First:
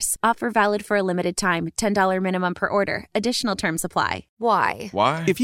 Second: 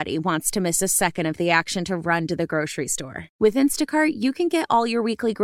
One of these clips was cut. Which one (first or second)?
first